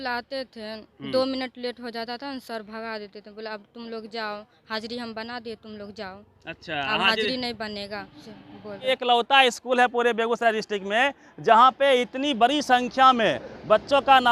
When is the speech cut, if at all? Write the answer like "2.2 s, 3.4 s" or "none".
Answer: 8.9 s